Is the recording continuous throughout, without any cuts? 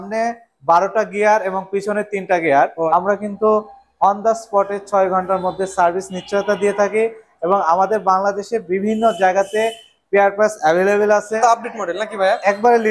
no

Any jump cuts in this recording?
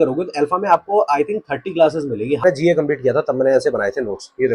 yes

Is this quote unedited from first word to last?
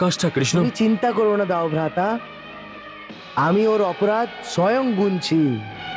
yes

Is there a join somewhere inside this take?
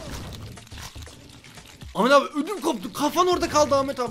no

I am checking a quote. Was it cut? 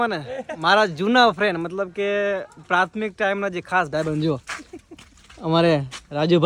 no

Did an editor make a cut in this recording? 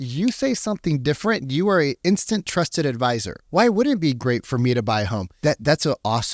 no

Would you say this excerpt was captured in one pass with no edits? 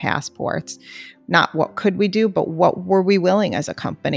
yes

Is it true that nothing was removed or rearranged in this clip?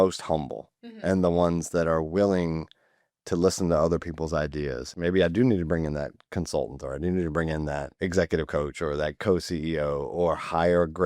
no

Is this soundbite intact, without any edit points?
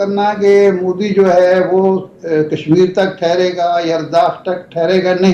yes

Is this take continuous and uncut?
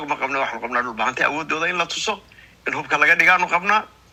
yes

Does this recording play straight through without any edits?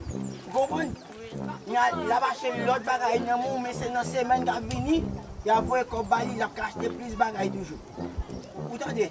yes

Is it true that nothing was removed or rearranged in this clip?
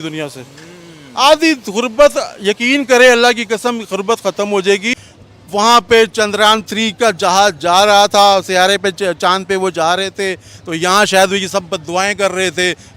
no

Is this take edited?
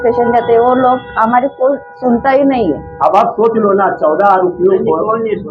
no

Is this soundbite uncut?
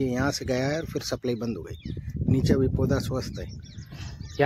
yes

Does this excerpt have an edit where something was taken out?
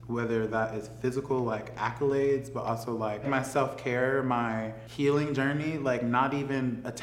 yes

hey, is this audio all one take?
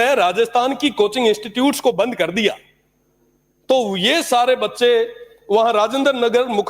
yes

